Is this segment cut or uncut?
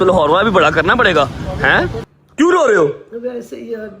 cut